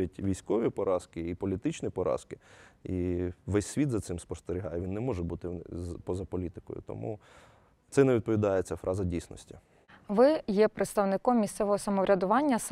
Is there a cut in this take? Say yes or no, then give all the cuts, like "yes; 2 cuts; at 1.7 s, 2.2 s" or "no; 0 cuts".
no; 0 cuts